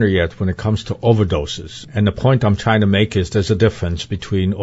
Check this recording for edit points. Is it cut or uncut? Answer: cut